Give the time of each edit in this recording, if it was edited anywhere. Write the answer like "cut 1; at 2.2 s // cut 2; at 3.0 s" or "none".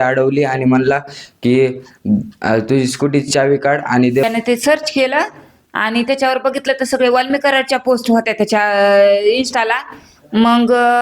cut 1; at 4.2 s